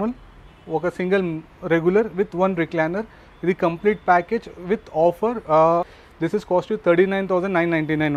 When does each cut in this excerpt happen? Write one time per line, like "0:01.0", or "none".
0:05.9